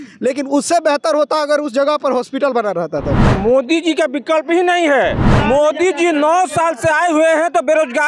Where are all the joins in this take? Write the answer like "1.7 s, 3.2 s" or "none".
3.3 s, 5.3 s